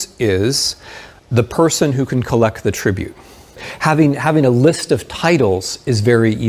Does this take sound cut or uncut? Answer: cut